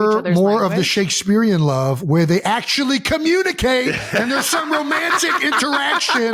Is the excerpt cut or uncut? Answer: uncut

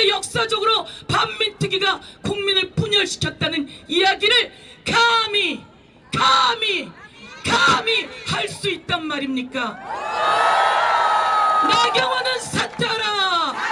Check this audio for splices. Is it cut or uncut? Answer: uncut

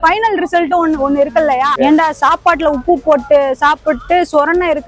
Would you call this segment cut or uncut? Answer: cut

